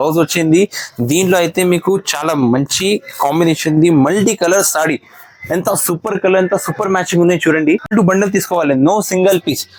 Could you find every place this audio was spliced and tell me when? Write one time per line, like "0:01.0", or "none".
0:07.9